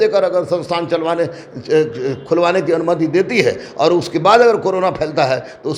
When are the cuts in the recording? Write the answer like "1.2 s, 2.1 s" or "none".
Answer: none

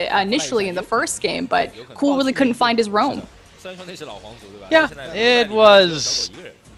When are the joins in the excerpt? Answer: none

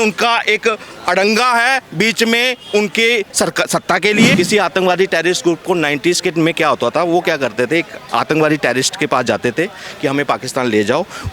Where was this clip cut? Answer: 4.3 s

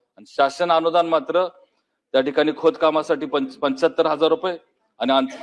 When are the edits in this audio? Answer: none

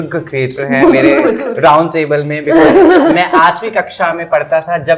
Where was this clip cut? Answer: none

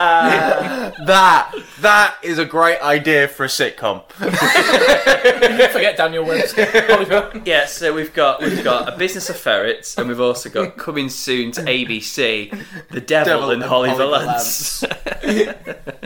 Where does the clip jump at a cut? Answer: none

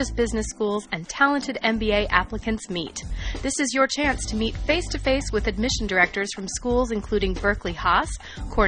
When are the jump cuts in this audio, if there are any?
none

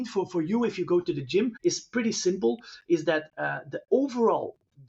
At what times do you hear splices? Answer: 1.5 s

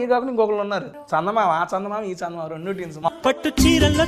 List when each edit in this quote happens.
0.9 s, 3.0 s

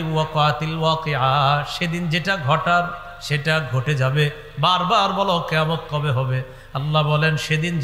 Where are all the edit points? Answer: none

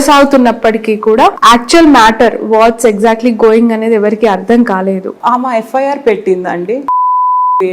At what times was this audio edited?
1.4 s, 5.2 s

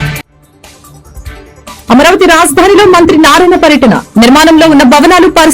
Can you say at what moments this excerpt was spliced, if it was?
1.8 s

